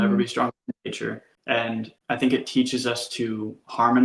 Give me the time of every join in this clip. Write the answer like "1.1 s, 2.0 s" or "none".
1.3 s, 1.9 s